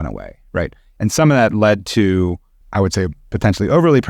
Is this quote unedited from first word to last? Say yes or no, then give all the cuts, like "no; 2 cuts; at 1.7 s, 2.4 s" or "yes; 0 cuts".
no; 1 cut; at 2.6 s